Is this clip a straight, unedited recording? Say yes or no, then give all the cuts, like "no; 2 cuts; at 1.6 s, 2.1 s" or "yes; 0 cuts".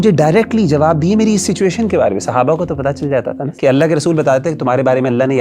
no; 1 cut; at 3.5 s